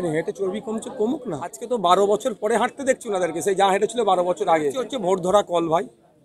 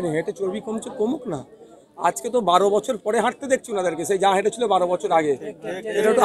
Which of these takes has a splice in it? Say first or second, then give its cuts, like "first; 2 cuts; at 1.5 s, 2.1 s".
first; 2 cuts; at 1.6 s, 4.9 s